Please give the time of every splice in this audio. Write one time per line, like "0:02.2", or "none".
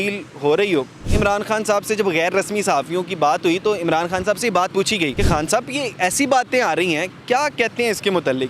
0:01.0
0:05.1